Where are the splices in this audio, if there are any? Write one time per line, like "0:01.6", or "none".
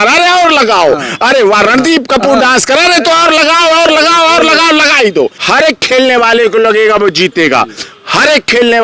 0:05.4